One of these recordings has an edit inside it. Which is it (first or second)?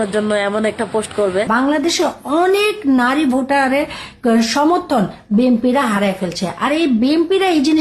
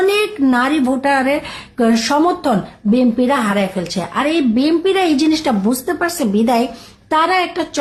first